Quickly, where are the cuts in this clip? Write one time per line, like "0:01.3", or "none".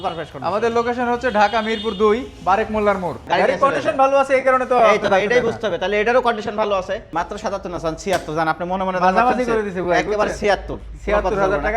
0:03.2
0:07.0